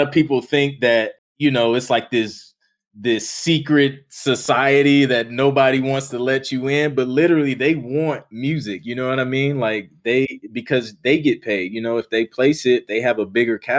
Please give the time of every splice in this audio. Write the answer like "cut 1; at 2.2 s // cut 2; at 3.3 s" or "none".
cut 1; at 1.2 s